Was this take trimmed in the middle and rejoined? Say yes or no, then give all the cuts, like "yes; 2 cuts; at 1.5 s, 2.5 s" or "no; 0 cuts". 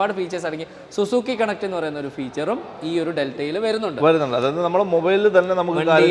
no; 0 cuts